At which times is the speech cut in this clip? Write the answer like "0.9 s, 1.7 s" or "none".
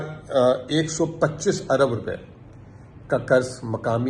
none

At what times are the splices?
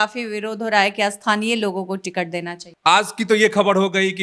2.6 s

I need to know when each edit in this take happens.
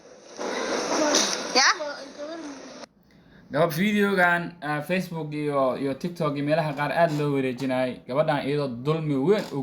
none

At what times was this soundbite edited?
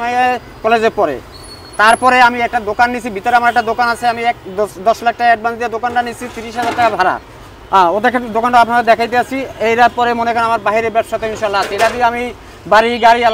none

